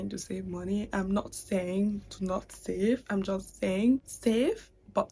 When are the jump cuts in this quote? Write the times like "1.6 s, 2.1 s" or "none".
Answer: 4.1 s